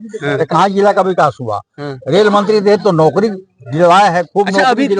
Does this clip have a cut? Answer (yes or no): no